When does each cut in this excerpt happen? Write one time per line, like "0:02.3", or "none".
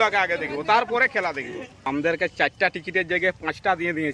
0:01.9